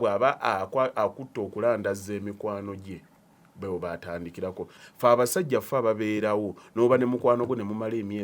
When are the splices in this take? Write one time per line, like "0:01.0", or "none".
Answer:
0:04.8